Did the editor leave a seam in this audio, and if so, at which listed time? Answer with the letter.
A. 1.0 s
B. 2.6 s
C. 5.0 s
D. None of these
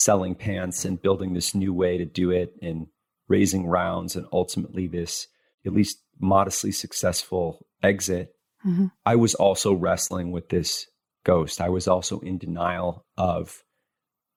D